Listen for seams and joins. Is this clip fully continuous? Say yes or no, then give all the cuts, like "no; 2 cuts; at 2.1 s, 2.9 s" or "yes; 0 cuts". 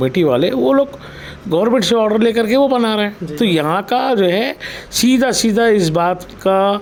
yes; 0 cuts